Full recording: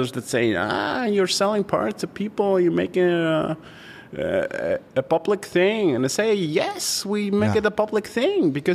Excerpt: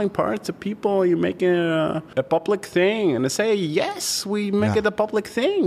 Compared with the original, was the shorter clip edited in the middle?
yes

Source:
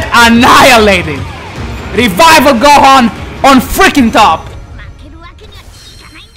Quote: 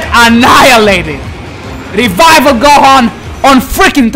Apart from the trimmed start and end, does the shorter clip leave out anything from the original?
no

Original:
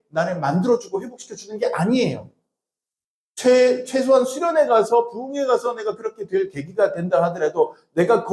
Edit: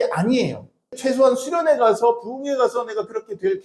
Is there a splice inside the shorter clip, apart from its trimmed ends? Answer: yes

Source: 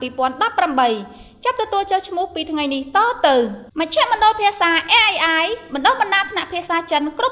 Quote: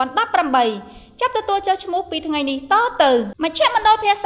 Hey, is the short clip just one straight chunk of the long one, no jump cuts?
no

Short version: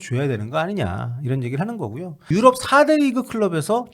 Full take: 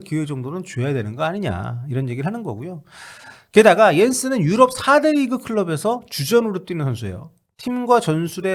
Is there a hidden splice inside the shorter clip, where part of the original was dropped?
yes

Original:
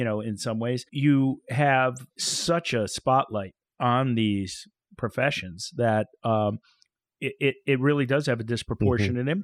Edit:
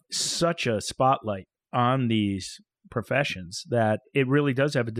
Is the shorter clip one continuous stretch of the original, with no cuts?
no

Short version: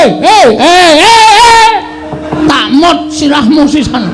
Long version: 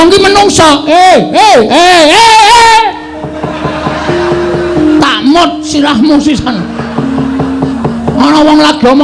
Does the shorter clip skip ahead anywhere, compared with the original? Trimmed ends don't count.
yes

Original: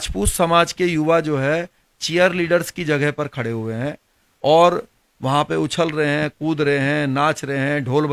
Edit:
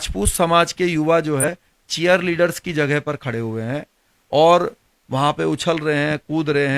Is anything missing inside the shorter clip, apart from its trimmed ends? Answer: yes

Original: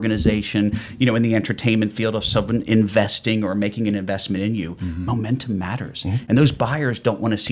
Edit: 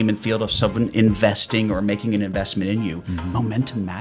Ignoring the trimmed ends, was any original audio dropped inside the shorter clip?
no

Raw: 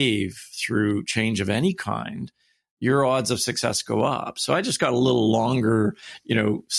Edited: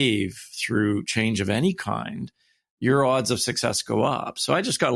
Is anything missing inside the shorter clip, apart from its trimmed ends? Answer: no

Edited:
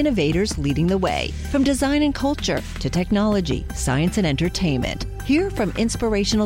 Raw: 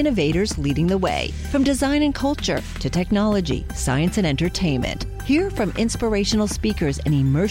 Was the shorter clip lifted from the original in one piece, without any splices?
yes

